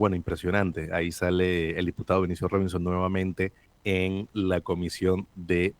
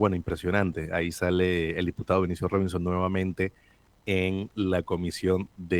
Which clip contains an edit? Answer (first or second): first